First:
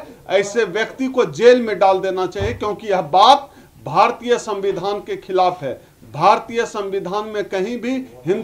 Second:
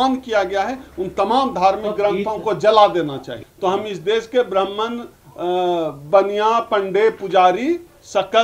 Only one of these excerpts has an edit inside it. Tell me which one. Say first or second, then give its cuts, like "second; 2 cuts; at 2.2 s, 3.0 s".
second; 1 cut; at 3.3 s